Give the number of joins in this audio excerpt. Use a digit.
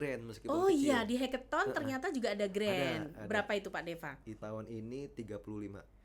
1